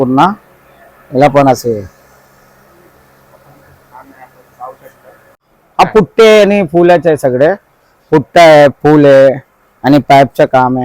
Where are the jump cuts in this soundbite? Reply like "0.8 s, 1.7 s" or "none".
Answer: 5.3 s